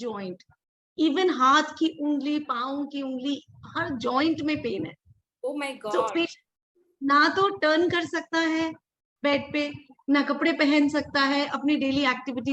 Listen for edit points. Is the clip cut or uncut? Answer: uncut